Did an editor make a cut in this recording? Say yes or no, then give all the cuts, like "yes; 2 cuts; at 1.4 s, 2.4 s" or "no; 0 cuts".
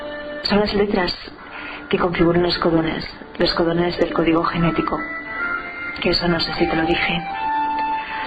no; 0 cuts